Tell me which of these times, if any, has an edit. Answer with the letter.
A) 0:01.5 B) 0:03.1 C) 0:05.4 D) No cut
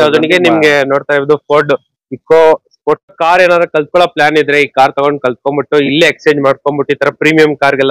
B